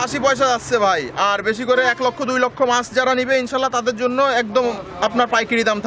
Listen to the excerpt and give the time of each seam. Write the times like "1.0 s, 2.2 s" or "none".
none